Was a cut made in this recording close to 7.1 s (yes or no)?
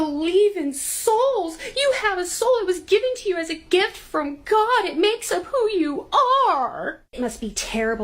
yes